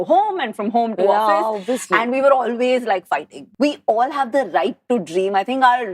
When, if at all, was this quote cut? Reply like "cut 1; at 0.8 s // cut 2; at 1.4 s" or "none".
cut 1; at 3.4 s